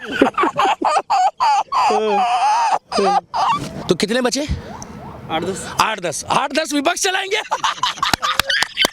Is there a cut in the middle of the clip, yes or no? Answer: yes